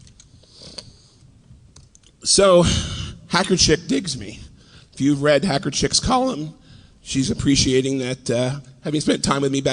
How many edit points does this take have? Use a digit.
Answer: 0